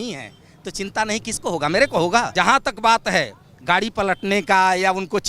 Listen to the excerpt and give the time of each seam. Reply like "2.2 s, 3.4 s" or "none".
2.3 s